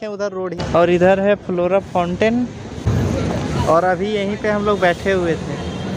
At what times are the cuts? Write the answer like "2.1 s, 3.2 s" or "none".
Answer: none